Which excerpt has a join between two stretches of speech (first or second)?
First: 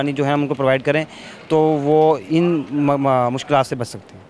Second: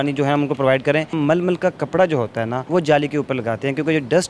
second